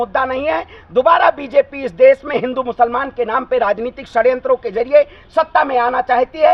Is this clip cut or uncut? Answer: uncut